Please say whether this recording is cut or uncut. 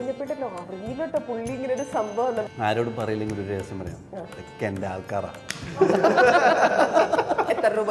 cut